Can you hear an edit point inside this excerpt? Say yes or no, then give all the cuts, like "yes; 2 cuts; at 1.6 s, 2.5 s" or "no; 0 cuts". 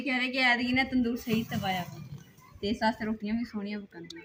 no; 0 cuts